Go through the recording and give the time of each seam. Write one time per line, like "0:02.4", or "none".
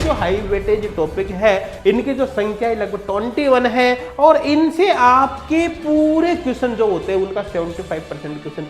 none

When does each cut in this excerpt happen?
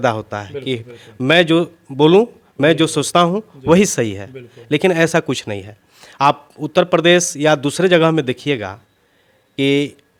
none

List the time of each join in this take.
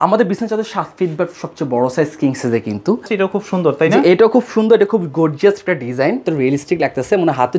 0:03.1
0:06.2

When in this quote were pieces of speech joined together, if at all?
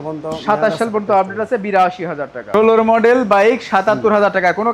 0:02.4

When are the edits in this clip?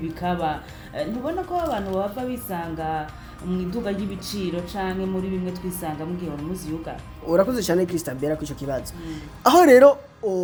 none

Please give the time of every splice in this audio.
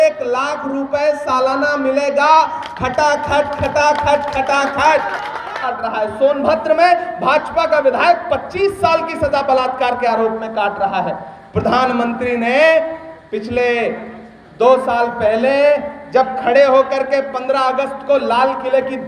0:05.7

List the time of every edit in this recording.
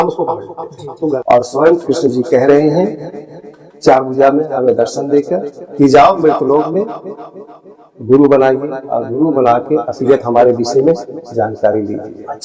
0:01.2

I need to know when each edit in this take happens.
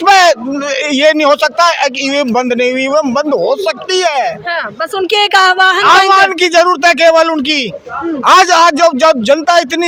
none

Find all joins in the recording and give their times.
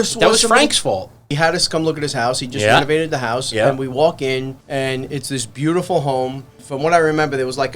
0:01.3
0:04.6
0:06.6

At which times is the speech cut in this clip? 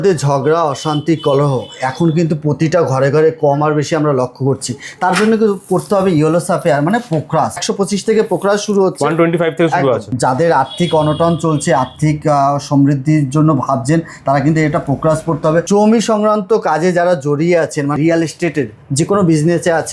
0:07.7
0:10.2
0:15.7
0:18.0

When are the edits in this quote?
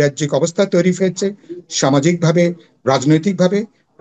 none

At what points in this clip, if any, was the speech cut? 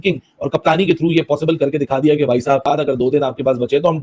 0:02.6

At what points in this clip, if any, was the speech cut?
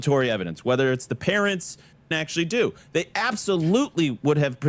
0:02.1

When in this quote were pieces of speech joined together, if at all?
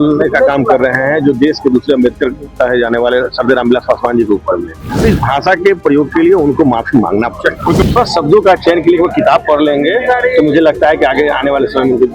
0:05.0
0:07.9

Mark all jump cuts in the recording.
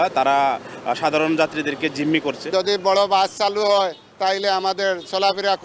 0:02.4

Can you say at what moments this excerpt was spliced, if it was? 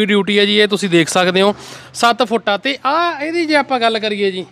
none

